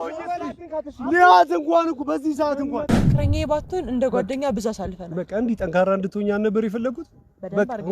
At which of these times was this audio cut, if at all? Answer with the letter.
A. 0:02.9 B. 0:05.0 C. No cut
A